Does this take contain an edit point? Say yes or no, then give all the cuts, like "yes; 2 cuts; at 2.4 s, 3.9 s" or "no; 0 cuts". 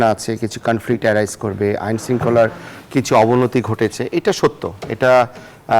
no; 0 cuts